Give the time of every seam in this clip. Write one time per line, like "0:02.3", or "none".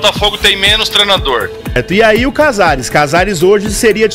0:01.8